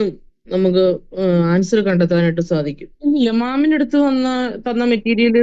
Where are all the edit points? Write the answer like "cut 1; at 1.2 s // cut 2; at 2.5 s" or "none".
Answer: cut 1; at 2.8 s